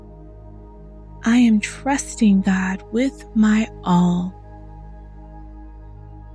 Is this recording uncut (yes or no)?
no